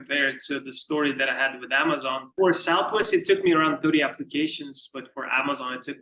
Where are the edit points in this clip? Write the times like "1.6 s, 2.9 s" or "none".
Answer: 2.3 s

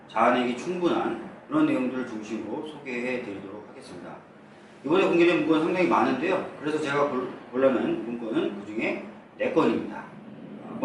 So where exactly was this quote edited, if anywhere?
none

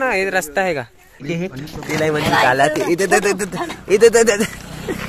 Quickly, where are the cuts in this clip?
1.2 s

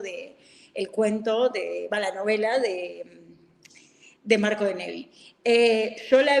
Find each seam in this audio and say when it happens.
none

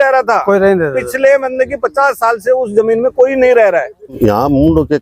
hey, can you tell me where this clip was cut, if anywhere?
4.0 s

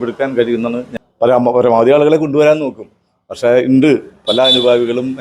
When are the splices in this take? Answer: 1.0 s

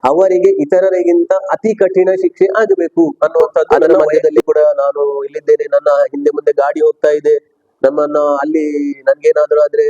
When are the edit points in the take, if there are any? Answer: 4.0 s

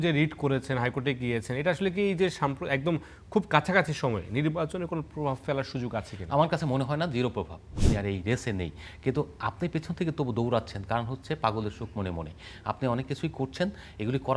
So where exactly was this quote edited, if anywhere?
7.7 s

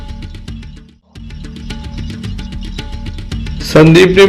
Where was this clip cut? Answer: 1.4 s, 3.0 s

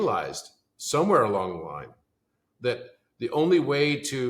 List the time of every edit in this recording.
none

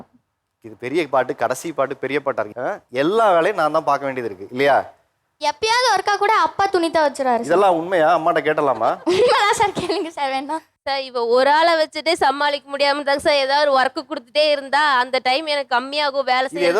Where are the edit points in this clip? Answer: none

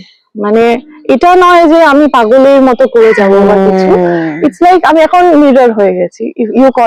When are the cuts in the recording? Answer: none

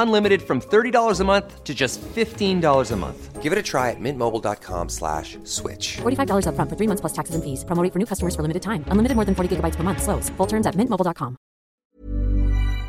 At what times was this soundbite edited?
11.8 s

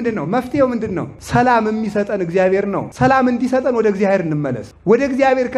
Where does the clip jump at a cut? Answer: 1.2 s, 2.9 s, 4.7 s

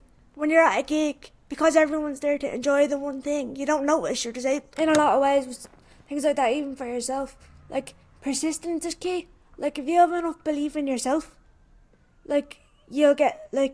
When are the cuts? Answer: 4.7 s

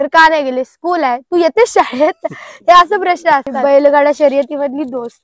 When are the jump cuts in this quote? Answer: 3.5 s

